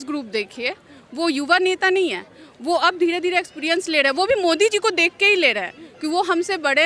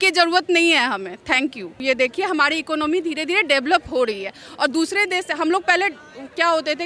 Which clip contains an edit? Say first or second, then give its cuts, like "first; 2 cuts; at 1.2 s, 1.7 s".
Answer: second; 1 cut; at 1.7 s